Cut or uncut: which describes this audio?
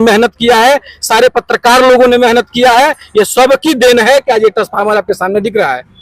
uncut